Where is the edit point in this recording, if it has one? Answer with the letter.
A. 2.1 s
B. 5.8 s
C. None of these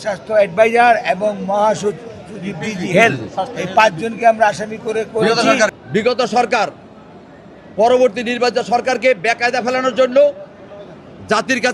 B